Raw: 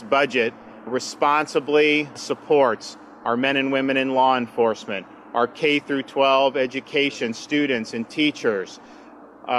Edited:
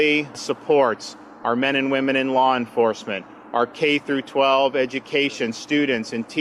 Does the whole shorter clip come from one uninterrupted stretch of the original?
yes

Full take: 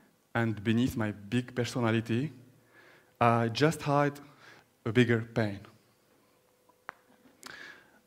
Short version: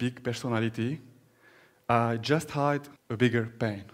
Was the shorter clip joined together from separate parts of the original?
yes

